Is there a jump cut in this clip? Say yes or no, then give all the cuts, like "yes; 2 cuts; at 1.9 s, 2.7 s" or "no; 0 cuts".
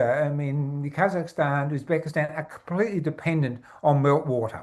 no; 0 cuts